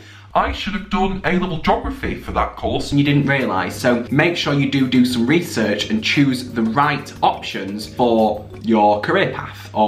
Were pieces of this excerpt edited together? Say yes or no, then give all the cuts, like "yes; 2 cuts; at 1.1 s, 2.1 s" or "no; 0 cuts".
no; 0 cuts